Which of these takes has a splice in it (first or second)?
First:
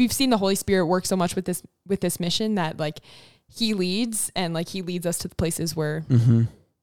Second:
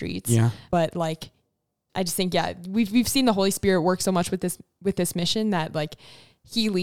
second